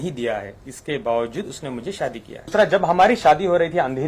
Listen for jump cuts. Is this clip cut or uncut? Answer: cut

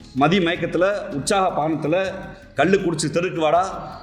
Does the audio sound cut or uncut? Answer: uncut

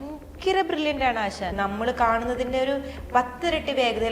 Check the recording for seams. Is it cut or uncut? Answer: cut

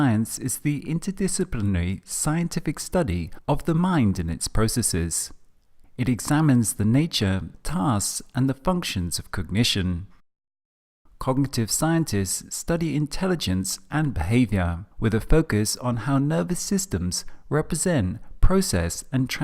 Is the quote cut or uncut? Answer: cut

